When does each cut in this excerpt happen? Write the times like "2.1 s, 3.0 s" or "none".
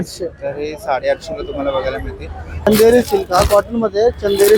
2.7 s